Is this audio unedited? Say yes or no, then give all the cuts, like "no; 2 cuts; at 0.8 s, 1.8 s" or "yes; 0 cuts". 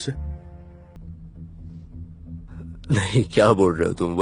no; 1 cut; at 1.0 s